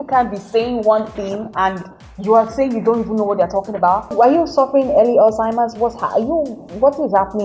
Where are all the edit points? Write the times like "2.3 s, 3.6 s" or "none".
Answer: 4.1 s